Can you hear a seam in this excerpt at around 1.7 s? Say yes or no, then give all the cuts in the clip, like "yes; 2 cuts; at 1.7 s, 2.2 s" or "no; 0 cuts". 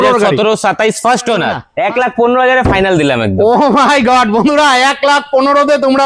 yes; 1 cut; at 1.7 s